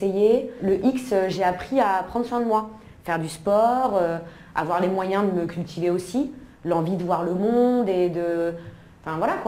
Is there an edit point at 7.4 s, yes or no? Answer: yes